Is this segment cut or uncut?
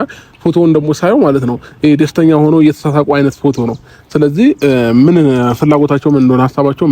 uncut